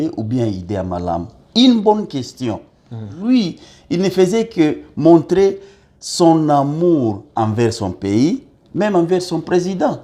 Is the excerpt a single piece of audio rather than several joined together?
no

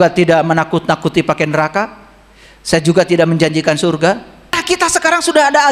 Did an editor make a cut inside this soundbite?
yes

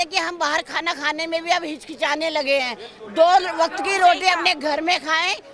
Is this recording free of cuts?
yes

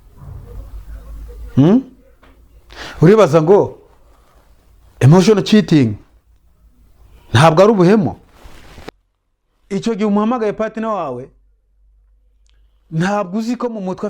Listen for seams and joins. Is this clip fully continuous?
no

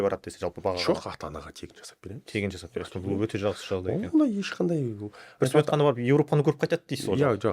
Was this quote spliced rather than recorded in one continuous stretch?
no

